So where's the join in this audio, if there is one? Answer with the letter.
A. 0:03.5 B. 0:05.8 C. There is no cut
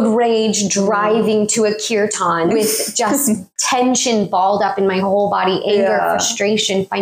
A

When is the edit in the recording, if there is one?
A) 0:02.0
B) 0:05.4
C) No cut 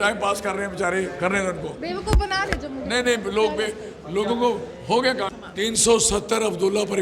B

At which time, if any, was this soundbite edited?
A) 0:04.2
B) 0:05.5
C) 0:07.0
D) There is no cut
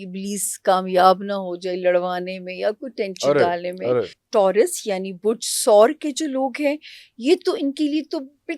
A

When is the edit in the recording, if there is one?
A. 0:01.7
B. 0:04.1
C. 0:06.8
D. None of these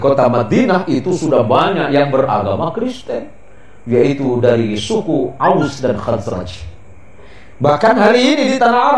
B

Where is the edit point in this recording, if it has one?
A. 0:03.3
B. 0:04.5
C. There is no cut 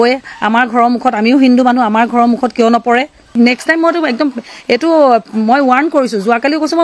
A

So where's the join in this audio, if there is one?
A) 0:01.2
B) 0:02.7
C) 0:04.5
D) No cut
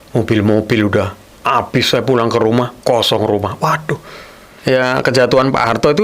C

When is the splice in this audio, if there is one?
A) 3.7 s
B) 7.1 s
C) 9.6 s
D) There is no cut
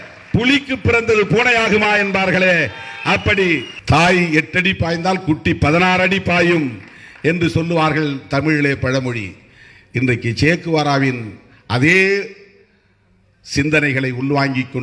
A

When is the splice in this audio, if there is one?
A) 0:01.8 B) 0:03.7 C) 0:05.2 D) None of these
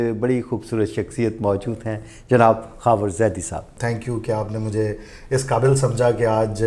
B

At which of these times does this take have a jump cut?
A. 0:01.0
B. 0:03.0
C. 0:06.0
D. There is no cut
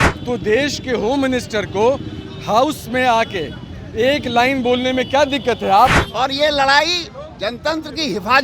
C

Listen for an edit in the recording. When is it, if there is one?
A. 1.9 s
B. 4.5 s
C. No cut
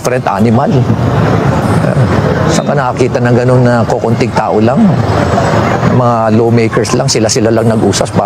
C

